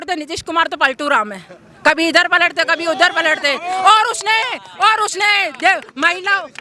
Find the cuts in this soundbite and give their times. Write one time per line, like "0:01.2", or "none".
none